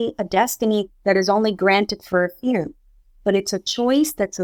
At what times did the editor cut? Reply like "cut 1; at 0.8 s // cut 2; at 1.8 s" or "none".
none